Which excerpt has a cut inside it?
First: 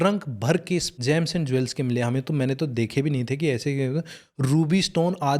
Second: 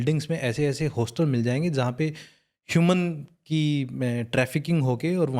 first; 1 cut; at 0.9 s

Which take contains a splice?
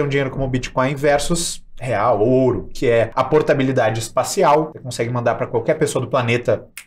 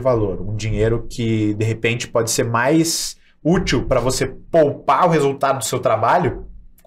first; 2 cuts; at 3.1 s, 4.8 s

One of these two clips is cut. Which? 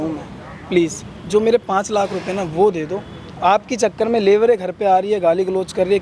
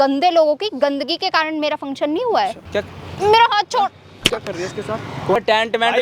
second; 2 cuts; at 2.6 s, 5.4 s

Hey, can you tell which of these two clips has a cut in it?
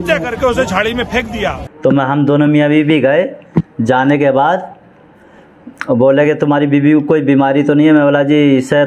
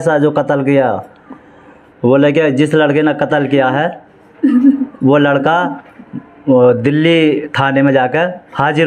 first; 1 cut; at 1.6 s

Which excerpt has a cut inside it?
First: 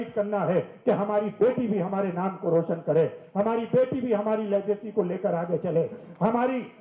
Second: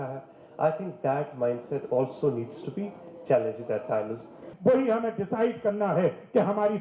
second; 1 cut; at 4.5 s

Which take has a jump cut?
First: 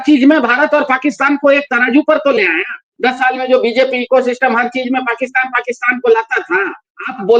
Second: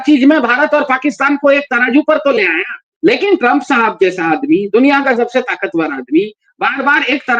first; 1 cut; at 2.9 s

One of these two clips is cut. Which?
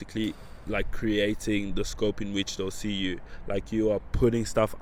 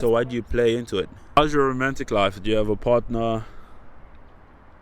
second; 1 cut; at 1.4 s

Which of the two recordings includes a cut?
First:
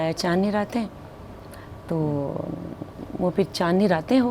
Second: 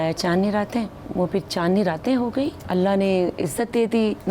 second; 2 cuts; at 1.0 s, 2.6 s

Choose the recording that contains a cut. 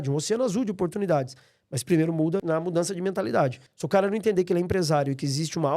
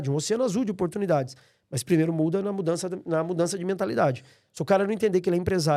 first; 2 cuts; at 2.4 s, 3.7 s

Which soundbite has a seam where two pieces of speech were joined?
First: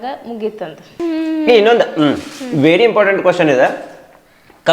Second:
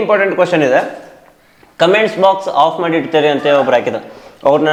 first; 1 cut; at 1.0 s

